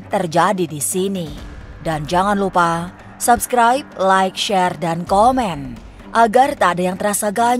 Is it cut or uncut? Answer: uncut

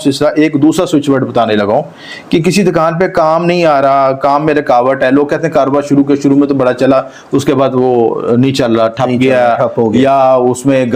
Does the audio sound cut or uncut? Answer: uncut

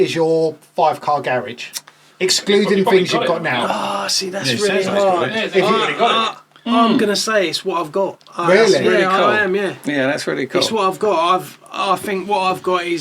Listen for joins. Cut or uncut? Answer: uncut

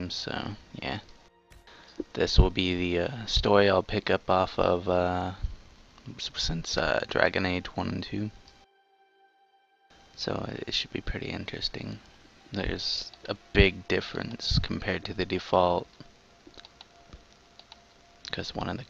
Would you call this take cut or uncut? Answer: cut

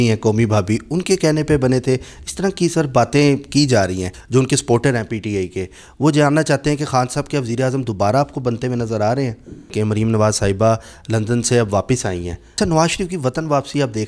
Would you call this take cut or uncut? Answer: cut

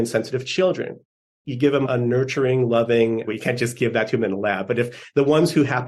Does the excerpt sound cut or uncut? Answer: cut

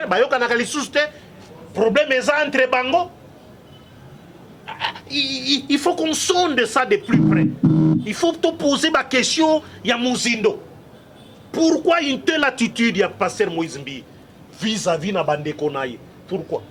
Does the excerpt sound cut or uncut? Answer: uncut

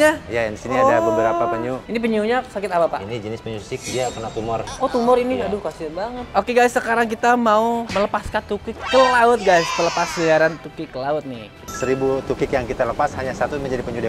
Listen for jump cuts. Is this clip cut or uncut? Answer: cut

